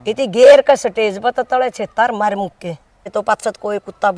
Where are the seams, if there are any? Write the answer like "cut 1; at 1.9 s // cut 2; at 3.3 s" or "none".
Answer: cut 1; at 3.1 s